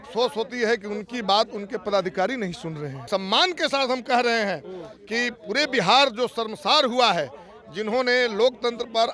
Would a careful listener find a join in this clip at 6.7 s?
no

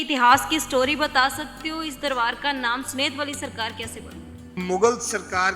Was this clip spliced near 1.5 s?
no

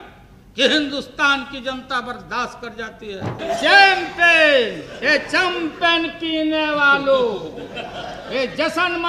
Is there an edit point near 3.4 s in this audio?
yes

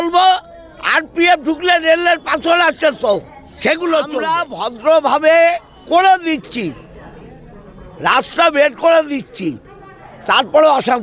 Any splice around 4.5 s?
yes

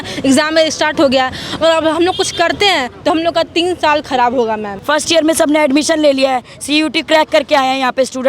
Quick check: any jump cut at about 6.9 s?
no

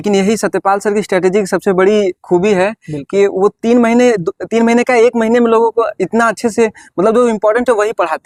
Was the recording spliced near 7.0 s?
no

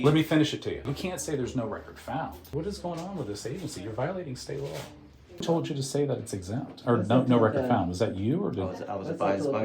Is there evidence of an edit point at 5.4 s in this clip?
yes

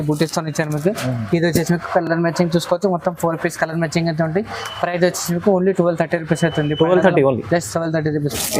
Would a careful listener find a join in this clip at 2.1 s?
no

